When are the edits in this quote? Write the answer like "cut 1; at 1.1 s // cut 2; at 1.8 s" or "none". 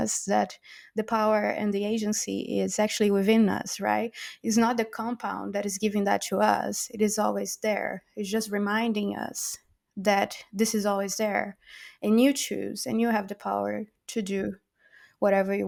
none

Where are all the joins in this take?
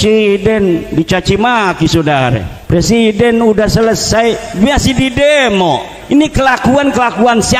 cut 1; at 2.5 s // cut 2; at 5.9 s

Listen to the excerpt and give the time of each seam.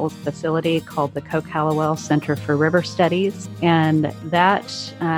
cut 1; at 3.5 s

